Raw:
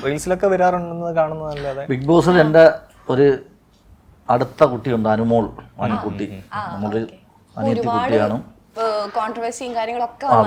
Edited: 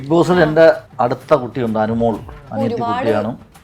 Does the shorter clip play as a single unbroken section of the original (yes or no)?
no